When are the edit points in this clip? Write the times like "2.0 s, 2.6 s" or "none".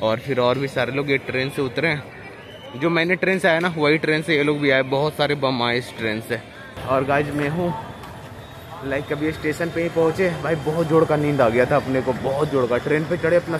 6.7 s